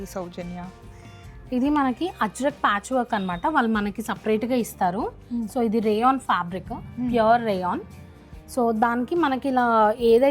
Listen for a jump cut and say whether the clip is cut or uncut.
uncut